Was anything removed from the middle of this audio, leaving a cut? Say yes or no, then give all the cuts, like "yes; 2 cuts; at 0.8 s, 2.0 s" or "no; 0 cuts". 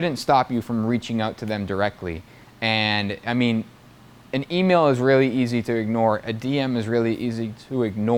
no; 0 cuts